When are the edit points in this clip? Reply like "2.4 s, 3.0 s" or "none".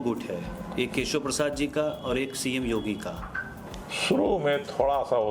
3.7 s